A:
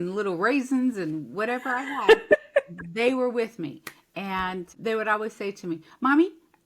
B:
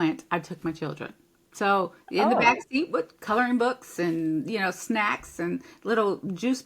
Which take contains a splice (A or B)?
A